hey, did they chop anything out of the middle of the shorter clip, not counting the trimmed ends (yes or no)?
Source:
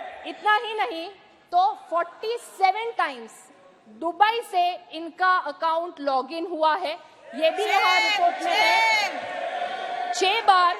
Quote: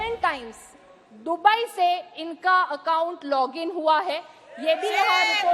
no